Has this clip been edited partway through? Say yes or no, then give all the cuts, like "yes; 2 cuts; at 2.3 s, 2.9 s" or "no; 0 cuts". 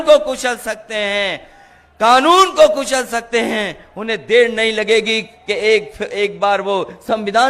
no; 0 cuts